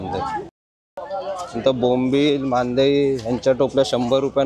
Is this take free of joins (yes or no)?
no